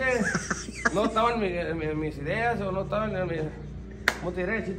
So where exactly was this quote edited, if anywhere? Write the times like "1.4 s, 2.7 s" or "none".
none